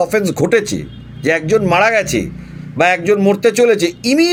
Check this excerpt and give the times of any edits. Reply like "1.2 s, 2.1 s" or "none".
none